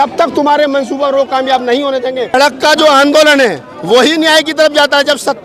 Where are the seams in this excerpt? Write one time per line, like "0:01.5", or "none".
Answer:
0:02.3